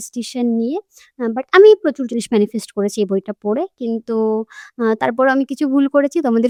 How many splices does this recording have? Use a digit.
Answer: 0